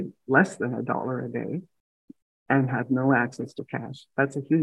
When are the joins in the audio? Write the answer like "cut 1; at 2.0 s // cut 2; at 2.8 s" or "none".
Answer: none

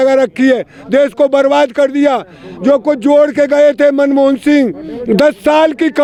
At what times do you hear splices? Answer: none

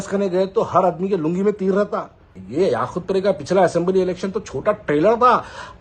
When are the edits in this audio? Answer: cut 1; at 2.3 s

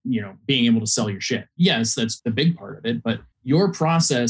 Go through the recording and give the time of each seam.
cut 1; at 1.5 s // cut 2; at 2.2 s // cut 3; at 3.3 s

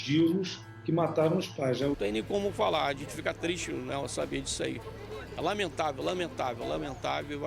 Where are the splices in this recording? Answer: cut 1; at 2.0 s

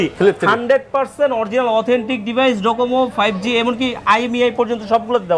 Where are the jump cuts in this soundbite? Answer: none

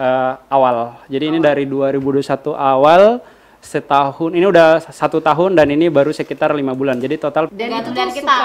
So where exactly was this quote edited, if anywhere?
cut 1; at 7.5 s

